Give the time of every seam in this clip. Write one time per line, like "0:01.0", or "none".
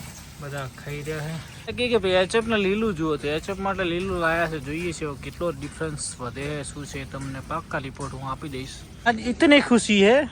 0:01.5
0:08.8